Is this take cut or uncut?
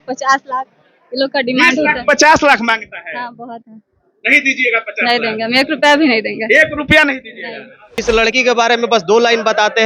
cut